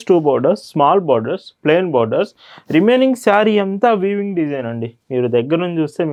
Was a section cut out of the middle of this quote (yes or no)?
no